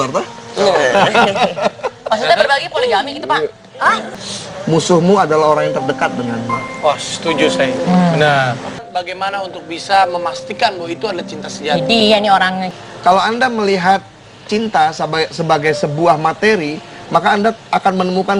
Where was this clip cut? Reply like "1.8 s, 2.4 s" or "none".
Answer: 4.2 s, 8.8 s, 12.7 s